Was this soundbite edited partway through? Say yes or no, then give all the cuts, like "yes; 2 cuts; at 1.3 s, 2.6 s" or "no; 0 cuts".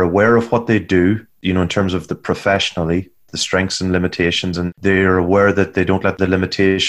yes; 3 cuts; at 1.3 s, 4.7 s, 6.1 s